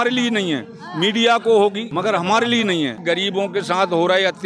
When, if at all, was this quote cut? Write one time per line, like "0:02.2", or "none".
0:01.9
0:03.0